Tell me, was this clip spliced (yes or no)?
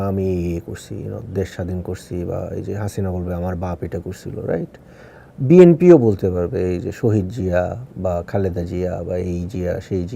no